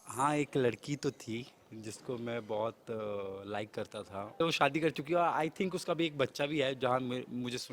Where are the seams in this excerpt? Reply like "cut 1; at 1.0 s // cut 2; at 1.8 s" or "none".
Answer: cut 1; at 4.4 s